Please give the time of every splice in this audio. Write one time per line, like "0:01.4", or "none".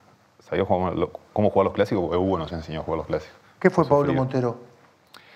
0:03.4